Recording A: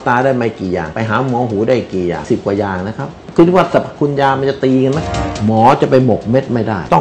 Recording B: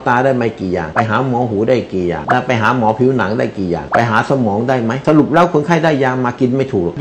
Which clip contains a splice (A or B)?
A